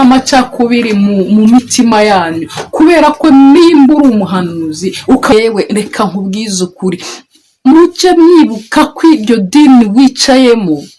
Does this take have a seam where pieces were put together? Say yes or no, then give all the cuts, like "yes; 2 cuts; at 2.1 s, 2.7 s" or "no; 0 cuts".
yes; 1 cut; at 5.3 s